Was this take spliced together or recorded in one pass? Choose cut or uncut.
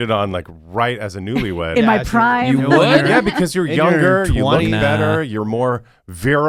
uncut